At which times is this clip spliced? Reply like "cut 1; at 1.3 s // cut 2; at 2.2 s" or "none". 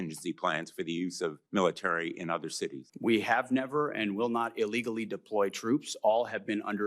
cut 1; at 1.4 s // cut 2; at 2.8 s

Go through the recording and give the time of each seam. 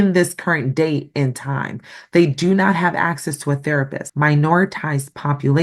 cut 1; at 4.0 s

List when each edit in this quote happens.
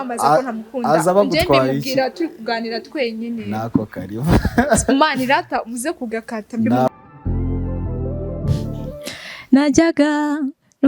cut 1; at 6.9 s // cut 2; at 8.9 s

